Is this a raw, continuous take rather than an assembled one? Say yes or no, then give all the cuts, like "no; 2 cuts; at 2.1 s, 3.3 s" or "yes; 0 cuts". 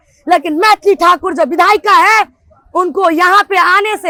yes; 0 cuts